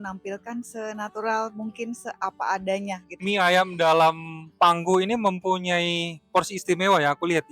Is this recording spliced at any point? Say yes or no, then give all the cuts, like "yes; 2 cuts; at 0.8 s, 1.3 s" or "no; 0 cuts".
yes; 1 cut; at 3.2 s